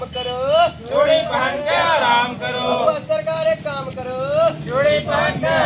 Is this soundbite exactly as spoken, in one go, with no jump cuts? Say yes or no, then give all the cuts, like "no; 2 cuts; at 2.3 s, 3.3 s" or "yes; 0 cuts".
yes; 0 cuts